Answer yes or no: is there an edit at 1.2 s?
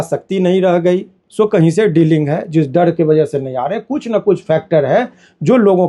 yes